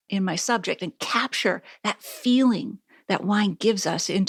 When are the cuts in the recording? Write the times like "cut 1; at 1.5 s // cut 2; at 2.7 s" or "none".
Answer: none